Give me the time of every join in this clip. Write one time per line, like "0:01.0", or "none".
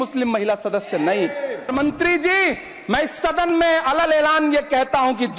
0:01.7